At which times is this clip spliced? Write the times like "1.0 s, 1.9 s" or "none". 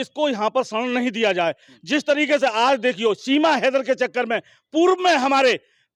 none